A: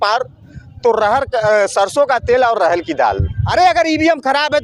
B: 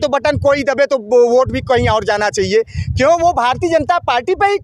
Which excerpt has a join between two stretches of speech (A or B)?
A